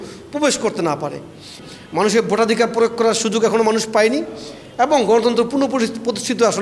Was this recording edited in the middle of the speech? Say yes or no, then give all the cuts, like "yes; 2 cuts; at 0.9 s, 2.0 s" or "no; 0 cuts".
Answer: yes; 1 cut; at 1.5 s